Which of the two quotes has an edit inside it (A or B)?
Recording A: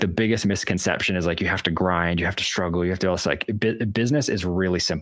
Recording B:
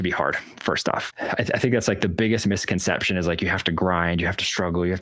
B